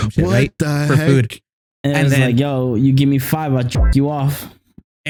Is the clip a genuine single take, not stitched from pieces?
yes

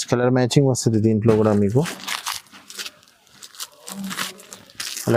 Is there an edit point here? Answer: no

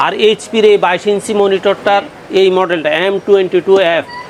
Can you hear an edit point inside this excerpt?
no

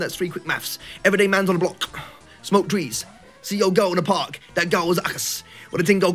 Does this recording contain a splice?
no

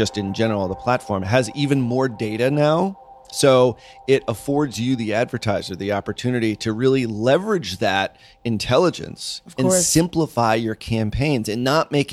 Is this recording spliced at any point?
no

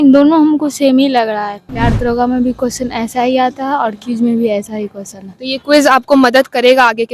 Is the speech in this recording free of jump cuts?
no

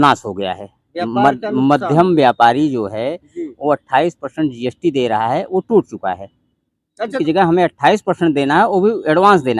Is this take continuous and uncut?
no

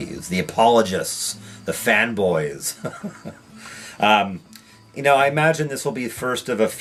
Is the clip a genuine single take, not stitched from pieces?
yes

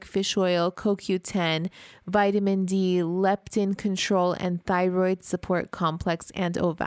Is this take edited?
no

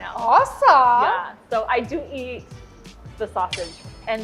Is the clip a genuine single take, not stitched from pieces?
yes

